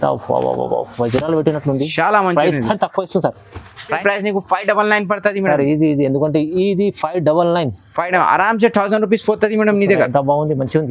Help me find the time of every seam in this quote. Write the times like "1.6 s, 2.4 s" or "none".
4.0 s

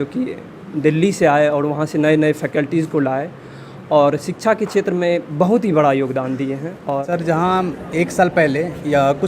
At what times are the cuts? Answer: 7.0 s

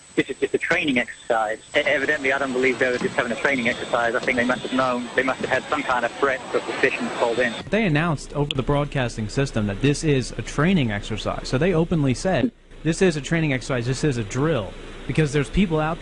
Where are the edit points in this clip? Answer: none

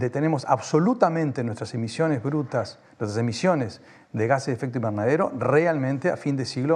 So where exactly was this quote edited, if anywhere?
none

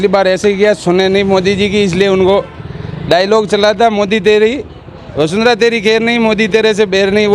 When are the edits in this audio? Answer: none

